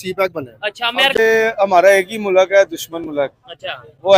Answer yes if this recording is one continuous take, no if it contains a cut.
no